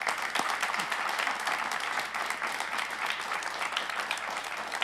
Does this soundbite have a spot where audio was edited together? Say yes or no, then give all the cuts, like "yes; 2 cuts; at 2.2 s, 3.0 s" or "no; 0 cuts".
no; 0 cuts